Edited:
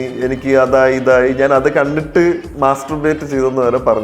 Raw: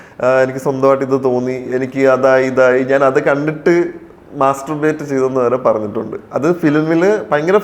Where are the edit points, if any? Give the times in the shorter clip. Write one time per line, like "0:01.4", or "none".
0:02.5